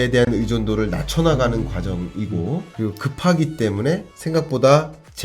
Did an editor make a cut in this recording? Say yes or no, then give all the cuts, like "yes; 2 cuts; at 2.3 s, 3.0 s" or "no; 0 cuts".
yes; 2 cuts; at 2.7 s, 4.1 s